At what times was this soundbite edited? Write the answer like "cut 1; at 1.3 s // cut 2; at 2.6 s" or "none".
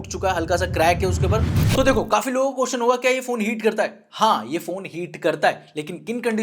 cut 1; at 1.7 s

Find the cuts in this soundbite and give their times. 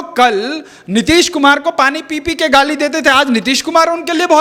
none

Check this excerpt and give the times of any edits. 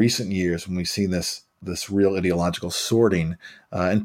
cut 1; at 1.6 s

